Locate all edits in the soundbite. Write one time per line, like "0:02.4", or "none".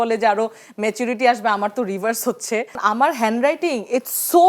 0:02.8